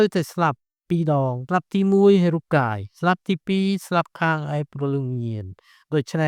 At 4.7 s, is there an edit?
no; 1 cut; at 1.4 s

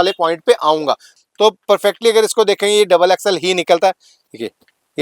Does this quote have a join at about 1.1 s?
yes; 1 cut; at 1.1 s

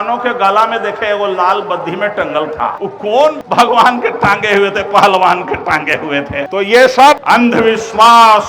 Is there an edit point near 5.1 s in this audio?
no; 3 cuts; at 3.3 s, 6.5 s, 7.2 s

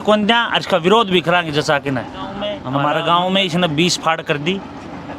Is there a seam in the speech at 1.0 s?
no; 1 cut; at 2.6 s

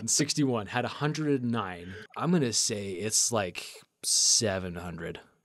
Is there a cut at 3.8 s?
no; 1 cut; at 2.0 s

